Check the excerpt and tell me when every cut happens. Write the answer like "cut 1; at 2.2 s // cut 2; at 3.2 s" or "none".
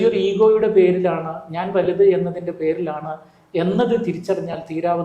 none